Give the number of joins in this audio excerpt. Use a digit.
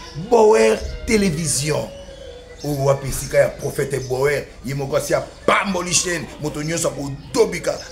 0